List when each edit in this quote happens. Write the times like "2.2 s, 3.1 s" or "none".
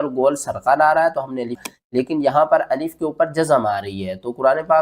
1.6 s